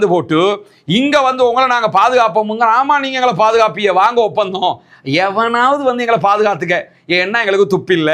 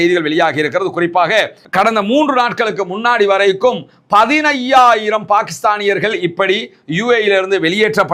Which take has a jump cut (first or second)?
second